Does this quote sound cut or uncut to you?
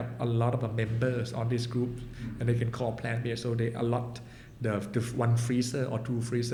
uncut